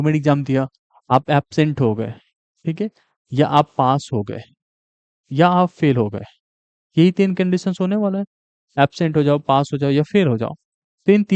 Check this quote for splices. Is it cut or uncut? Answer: uncut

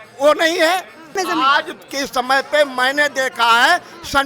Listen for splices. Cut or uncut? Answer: cut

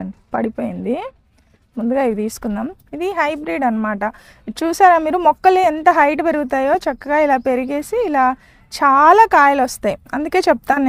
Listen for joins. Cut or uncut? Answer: uncut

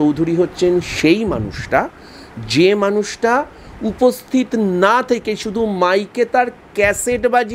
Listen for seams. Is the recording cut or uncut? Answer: uncut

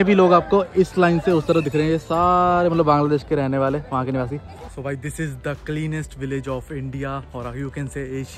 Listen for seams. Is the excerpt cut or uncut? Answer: cut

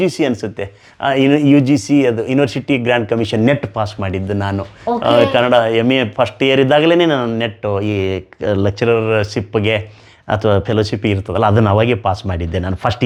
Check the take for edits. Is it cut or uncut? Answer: uncut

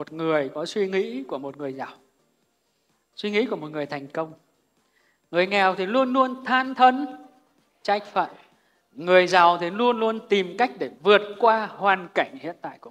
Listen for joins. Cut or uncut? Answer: uncut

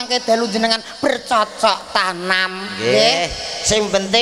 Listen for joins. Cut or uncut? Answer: uncut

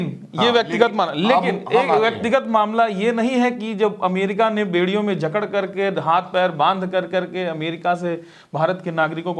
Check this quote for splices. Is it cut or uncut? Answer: uncut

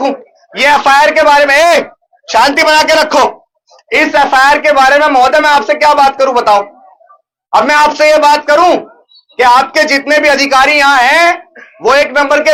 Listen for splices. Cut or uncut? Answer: uncut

